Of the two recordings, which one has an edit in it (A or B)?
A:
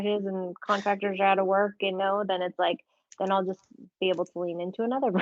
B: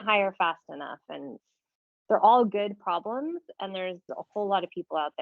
B